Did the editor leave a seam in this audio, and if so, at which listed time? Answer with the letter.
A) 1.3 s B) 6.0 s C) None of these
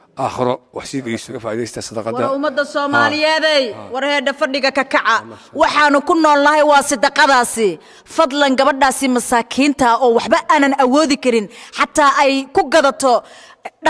A